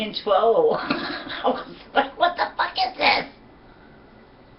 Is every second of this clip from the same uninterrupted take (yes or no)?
no